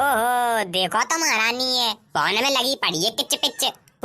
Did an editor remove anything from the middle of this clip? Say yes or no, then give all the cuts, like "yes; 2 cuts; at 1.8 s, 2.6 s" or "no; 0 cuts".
no; 0 cuts